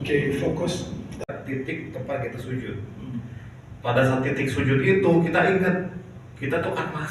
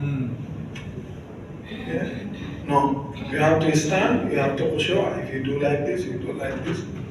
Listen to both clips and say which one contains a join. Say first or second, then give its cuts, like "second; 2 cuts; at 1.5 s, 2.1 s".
first; 1 cut; at 1.3 s